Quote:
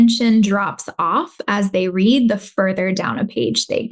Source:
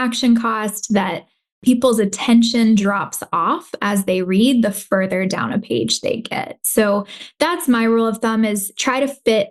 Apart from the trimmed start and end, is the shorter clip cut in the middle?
no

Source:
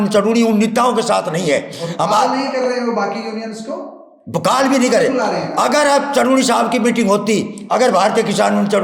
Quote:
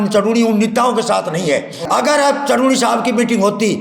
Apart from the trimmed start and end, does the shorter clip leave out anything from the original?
yes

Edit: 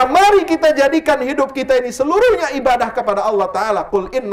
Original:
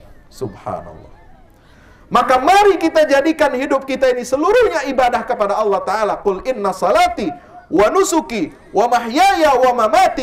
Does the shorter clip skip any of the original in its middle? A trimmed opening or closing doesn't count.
no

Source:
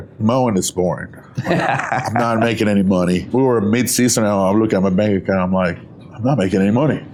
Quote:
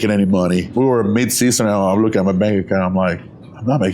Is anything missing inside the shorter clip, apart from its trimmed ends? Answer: no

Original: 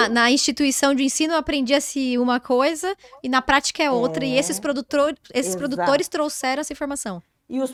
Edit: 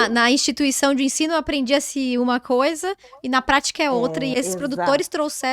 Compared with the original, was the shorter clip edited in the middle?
yes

